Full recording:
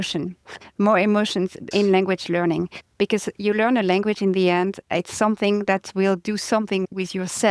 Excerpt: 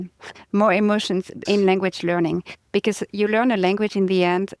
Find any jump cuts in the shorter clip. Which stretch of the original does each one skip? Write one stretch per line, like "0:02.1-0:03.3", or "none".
none